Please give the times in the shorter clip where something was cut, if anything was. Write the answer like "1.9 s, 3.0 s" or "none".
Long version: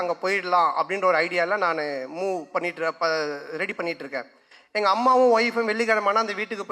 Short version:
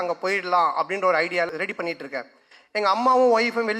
1.5 s